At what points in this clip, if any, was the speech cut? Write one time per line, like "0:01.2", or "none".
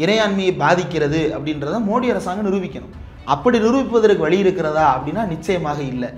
none

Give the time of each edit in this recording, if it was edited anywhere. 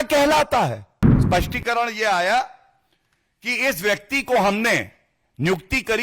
0:01.2

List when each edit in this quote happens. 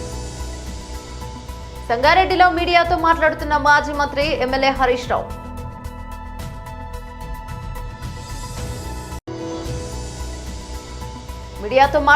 0:01.4

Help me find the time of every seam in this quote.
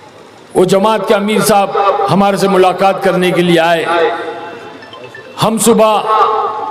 none

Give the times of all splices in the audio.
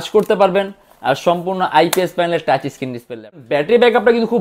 0:03.4

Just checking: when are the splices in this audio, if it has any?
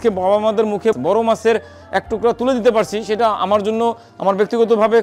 0:01.0
0:04.1

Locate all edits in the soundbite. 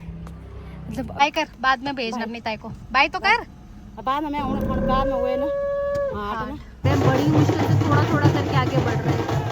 0:01.2
0:06.8

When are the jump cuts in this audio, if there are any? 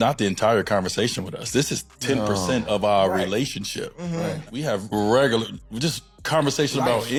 none

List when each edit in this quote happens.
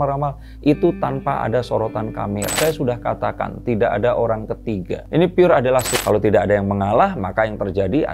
0:02.5
0:05.9

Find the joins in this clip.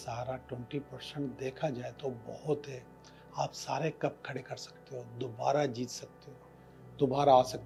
none

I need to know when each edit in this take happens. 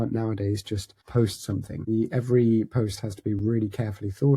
0:00.9
0:01.7

